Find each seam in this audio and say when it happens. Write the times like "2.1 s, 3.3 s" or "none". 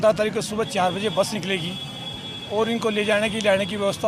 none

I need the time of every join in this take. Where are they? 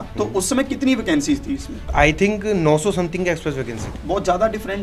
1.8 s, 3.9 s

